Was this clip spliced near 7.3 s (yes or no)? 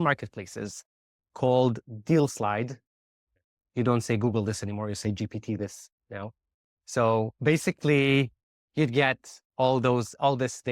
yes